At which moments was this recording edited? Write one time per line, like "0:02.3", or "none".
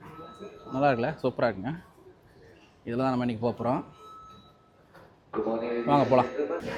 none